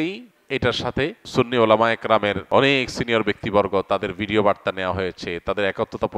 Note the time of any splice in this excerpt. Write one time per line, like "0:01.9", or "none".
0:01.2
0:02.4